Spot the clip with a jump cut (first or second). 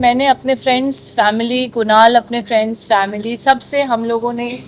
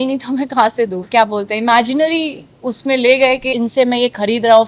second